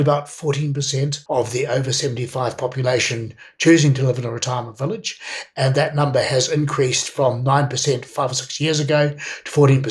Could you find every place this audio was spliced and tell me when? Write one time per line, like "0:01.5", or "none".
0:01.2